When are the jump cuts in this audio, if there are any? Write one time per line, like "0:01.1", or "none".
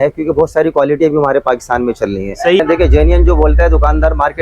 0:02.6